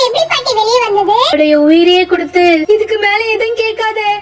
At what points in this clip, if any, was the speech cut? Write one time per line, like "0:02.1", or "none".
0:01.4